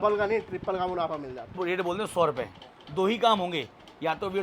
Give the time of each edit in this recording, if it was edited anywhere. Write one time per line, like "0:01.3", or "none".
0:01.4